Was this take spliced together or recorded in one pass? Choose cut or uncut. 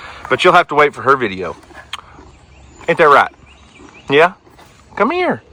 uncut